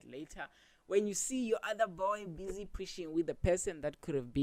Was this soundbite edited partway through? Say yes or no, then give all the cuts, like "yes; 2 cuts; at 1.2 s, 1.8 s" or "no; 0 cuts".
no; 0 cuts